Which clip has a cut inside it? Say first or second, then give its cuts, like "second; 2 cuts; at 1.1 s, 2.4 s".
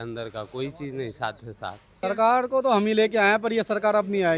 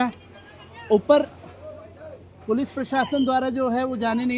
first; 1 cut; at 1.9 s